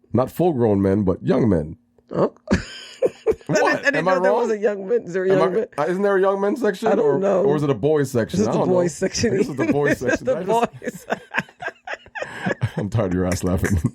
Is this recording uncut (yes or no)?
yes